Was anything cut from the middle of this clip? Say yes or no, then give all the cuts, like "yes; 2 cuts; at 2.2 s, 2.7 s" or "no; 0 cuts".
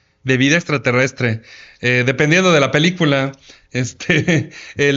no; 0 cuts